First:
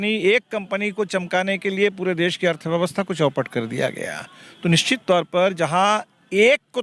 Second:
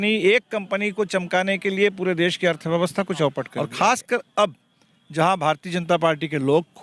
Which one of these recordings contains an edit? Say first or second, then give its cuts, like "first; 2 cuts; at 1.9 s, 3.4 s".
second; 1 cut; at 3.4 s